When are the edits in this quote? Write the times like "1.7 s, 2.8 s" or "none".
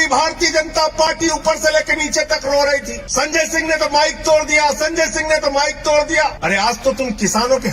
3.0 s, 6.4 s

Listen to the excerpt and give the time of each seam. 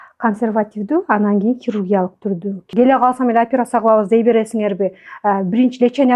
2.6 s

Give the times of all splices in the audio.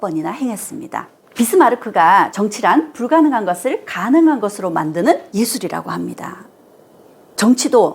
1.2 s

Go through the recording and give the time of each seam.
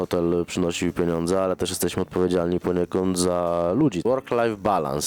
4.0 s

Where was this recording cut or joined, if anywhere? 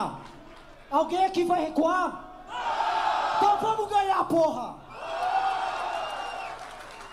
none

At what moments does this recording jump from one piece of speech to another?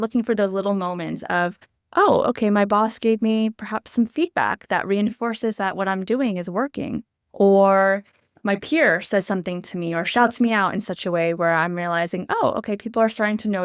none

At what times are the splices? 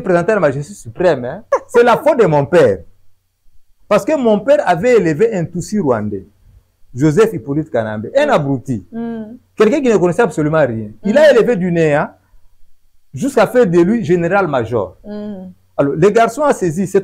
1.4 s

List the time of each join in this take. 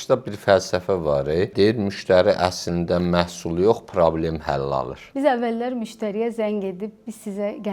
1.5 s, 5.0 s

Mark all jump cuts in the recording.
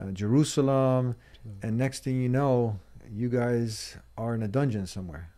none

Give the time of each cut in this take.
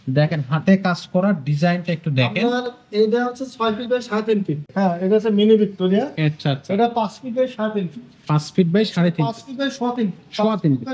4.7 s

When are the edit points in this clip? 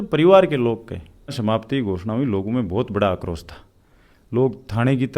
1.3 s

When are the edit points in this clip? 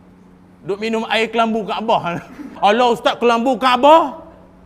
2.5 s

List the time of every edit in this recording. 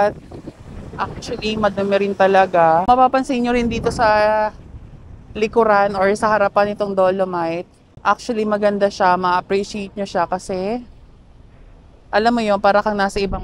2.8 s, 7.7 s

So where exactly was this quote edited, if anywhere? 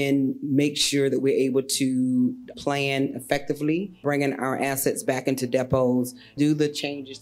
2.5 s, 3.9 s, 6.3 s

